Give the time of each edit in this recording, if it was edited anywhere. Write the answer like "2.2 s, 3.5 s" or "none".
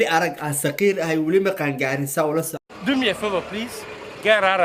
none

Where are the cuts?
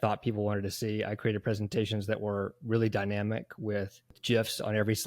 4.2 s

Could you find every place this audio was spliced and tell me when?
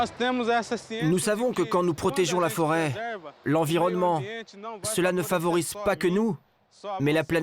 0.9 s

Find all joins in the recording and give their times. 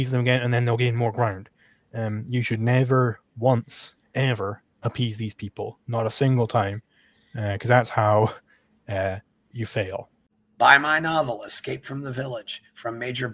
10.2 s

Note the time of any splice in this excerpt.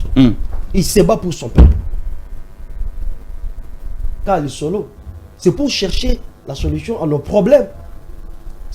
4.2 s

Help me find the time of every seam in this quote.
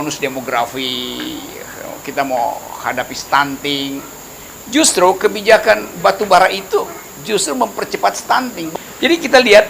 8.7 s

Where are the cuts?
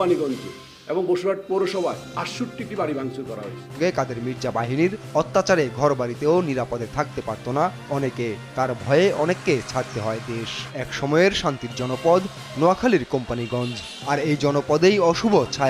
3.7 s, 10.6 s

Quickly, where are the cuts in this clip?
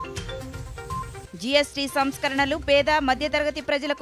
none

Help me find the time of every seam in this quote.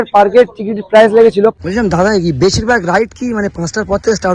1.6 s

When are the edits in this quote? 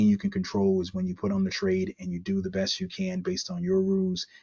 none

